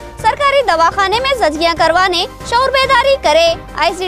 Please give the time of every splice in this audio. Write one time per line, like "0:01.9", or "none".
none